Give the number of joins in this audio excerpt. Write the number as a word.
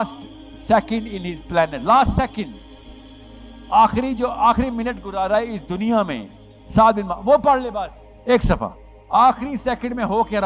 two